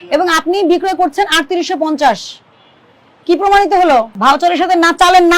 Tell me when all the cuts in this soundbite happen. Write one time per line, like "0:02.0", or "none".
0:04.2